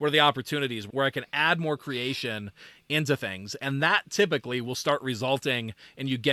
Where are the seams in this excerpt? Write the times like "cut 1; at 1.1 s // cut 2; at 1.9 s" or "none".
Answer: none